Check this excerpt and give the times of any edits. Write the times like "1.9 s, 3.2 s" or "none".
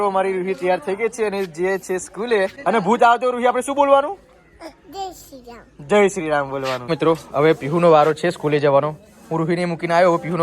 2.6 s, 6.8 s

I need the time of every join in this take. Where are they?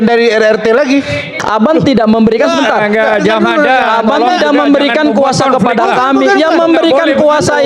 1.3 s

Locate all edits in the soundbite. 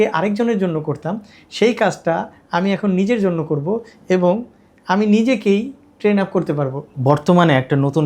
6.9 s

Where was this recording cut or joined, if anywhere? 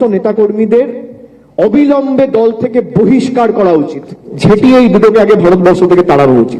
none

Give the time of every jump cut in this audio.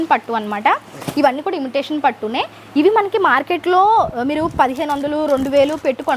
none

